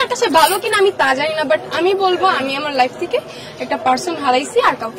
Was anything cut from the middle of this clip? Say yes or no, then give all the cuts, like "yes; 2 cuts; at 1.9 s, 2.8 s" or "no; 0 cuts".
no; 0 cuts